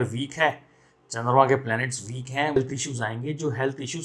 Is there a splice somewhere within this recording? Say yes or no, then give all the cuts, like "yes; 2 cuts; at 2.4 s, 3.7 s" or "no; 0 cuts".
yes; 1 cut; at 2.6 s